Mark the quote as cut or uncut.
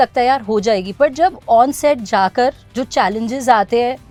uncut